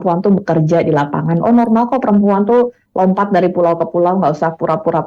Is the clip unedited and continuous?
yes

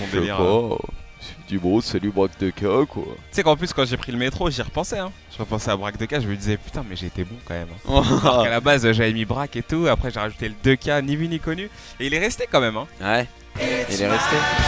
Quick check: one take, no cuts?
yes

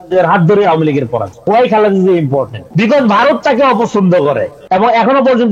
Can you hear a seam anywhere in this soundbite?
yes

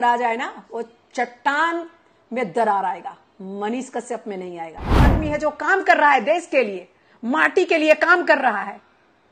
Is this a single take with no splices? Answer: no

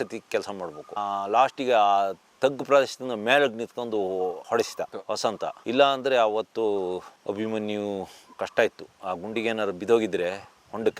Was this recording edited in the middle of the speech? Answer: no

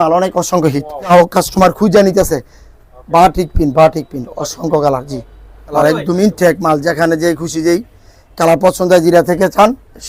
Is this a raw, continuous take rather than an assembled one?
no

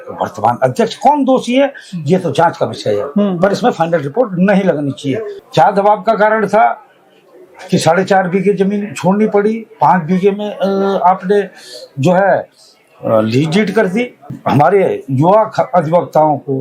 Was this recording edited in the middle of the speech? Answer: yes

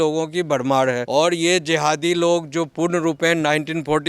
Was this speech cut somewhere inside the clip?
yes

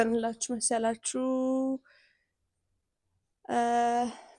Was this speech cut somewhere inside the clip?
no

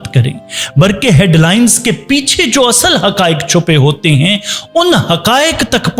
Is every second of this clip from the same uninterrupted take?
yes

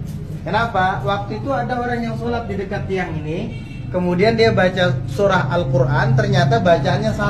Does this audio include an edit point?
no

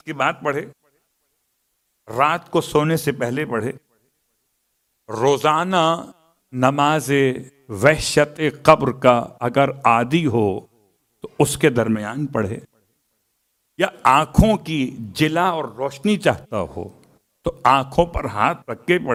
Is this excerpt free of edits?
yes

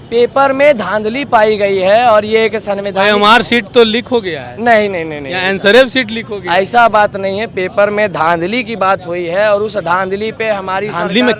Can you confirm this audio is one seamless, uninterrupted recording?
yes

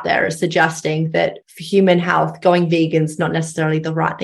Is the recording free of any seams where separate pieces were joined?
no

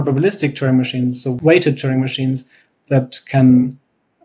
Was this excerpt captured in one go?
no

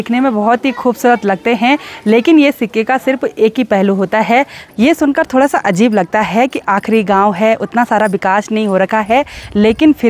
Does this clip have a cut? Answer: yes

